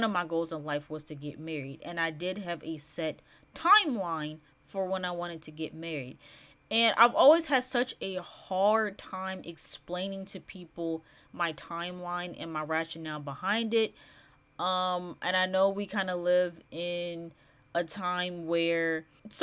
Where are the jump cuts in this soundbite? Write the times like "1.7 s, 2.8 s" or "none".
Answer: none